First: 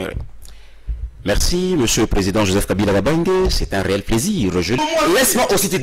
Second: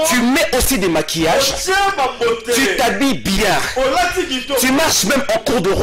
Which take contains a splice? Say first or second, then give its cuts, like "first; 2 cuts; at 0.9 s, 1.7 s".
first; 1 cut; at 4.8 s